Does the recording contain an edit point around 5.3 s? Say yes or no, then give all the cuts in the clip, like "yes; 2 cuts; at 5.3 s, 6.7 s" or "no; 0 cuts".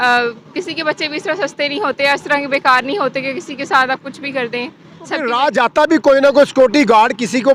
yes; 1 cut; at 5.3 s